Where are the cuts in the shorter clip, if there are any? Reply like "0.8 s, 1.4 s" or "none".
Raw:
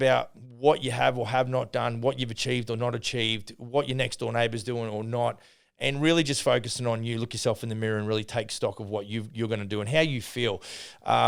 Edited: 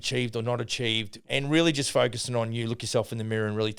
1.1 s